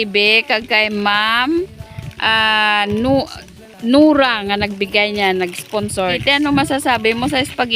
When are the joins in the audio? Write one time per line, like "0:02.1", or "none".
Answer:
0:06.2